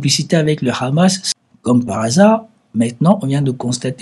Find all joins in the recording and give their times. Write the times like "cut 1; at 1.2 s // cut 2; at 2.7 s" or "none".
cut 1; at 1.3 s